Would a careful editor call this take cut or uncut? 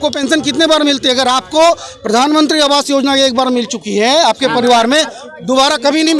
uncut